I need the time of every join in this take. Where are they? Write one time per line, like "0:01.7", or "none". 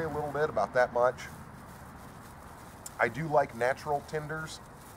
0:04.0

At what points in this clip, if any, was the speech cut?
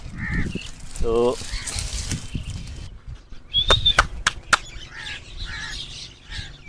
0:03.1

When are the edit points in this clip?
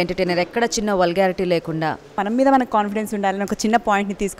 0:02.2

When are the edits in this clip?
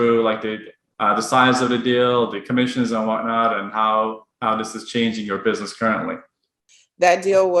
0:06.7

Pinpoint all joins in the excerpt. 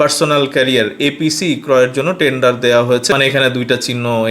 0:03.1

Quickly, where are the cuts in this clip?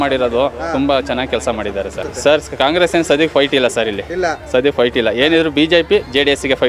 0:02.1

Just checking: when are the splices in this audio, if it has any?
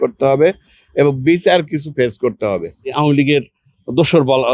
0:02.9

